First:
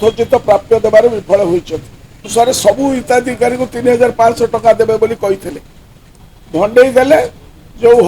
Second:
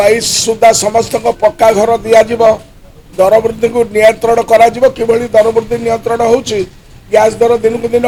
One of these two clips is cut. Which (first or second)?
first